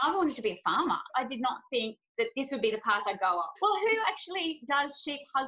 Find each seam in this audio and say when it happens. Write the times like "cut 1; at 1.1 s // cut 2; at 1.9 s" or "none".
cut 1; at 1.1 s // cut 2; at 3.5 s